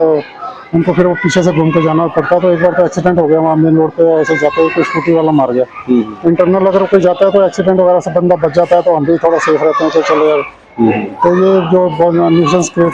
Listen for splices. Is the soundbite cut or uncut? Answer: uncut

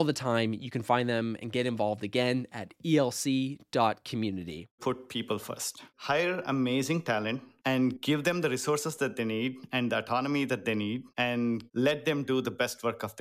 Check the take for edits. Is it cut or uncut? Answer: cut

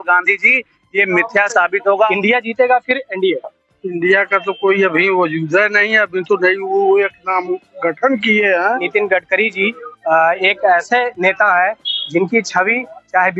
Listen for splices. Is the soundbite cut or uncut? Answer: cut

